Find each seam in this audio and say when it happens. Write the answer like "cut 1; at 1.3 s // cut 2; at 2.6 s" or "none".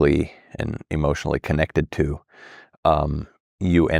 none